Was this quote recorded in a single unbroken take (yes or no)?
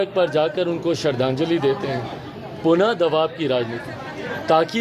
yes